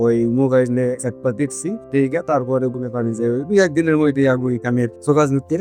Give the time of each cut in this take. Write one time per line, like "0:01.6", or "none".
none